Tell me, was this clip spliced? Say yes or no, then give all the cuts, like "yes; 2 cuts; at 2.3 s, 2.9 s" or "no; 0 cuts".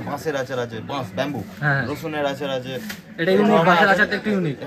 no; 0 cuts